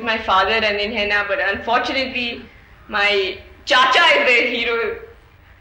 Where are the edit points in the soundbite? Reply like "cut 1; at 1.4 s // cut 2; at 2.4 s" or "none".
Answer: none